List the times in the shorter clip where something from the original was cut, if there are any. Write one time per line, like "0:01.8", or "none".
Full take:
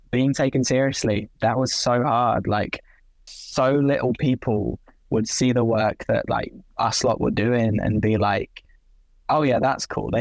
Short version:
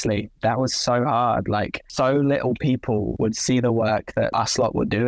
0:01.8
0:03.1
0:04.3